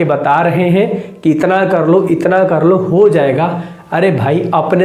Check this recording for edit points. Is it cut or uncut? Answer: uncut